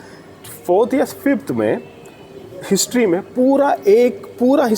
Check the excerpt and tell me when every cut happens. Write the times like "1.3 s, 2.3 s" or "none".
none